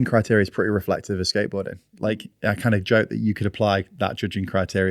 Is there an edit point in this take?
no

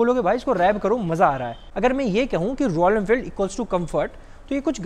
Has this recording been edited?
yes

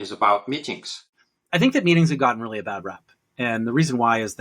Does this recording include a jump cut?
yes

